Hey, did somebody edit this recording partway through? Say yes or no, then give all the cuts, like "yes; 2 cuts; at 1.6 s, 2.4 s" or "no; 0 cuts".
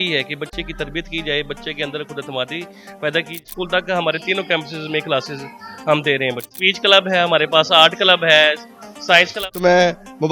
yes; 3 cuts; at 3.4 s, 6.5 s, 9.4 s